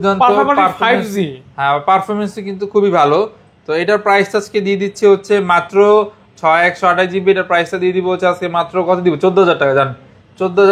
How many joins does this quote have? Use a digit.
0